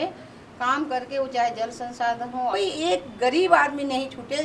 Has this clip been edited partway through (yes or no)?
yes